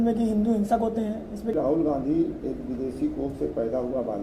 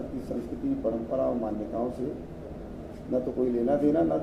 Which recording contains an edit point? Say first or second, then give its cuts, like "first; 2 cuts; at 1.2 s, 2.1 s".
first; 1 cut; at 1.5 s